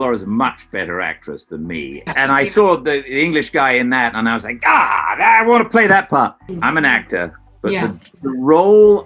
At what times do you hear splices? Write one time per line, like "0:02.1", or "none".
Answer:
0:02.1
0:06.5

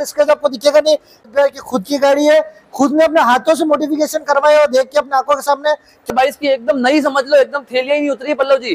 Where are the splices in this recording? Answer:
0:01.3
0:06.1

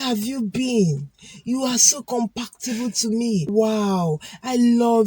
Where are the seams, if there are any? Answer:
0:03.5

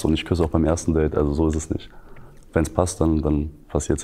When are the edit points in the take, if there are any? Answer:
0:01.2

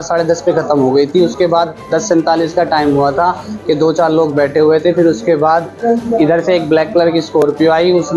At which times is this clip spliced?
none

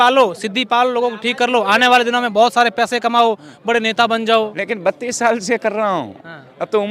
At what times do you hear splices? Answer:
none

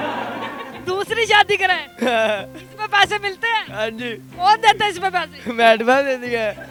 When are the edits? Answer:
none

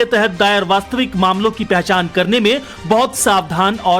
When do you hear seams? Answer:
0:01.4

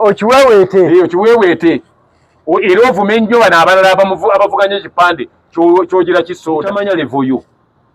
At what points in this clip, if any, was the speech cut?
0:06.7

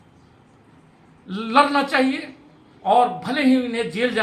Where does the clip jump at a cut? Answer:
none

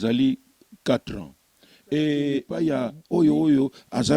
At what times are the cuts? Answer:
0:02.5

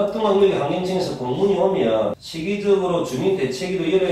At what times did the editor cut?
0:02.3

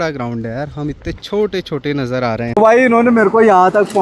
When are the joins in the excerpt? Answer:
0:02.5

